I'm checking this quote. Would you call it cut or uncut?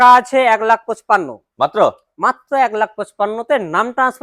uncut